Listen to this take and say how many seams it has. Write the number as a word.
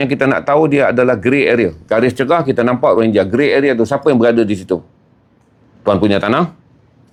zero